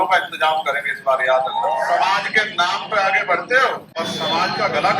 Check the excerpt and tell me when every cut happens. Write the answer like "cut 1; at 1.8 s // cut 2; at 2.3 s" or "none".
cut 1; at 1.8 s // cut 2; at 3.9 s